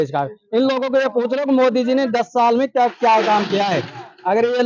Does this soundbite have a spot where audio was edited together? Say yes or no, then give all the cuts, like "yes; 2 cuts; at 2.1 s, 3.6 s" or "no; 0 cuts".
no; 0 cuts